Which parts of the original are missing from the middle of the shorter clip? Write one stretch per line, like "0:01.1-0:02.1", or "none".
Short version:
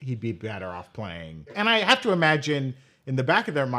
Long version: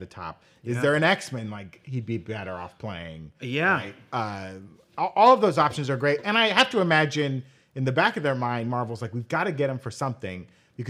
0:03.4-0:06.2